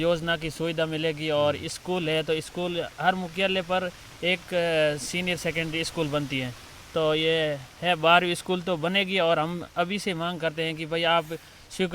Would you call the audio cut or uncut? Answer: uncut